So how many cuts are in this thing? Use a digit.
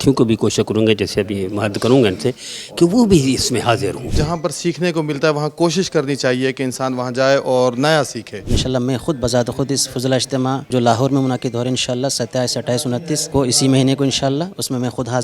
4